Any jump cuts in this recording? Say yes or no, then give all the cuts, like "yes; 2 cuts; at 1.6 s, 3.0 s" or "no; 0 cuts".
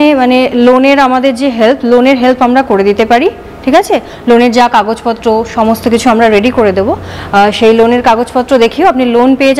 no; 0 cuts